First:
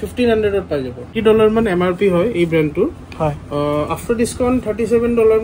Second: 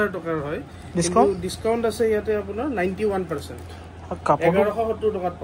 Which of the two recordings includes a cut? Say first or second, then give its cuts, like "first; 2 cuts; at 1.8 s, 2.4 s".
first; 1 cut; at 1.1 s